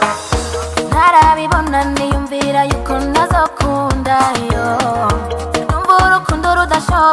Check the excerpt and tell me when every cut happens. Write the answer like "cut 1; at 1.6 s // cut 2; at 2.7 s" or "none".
none